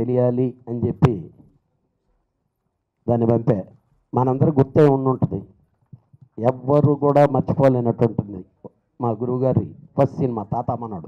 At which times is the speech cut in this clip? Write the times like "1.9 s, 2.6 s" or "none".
none